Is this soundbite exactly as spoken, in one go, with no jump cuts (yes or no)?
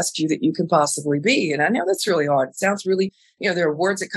yes